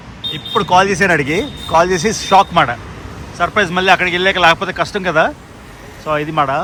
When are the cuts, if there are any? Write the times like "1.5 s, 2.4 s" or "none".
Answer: none